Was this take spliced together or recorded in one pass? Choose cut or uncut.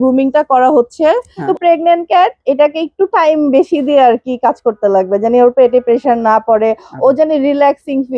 cut